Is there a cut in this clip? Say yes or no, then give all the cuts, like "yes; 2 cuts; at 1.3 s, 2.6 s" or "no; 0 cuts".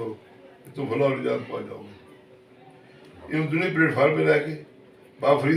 no; 0 cuts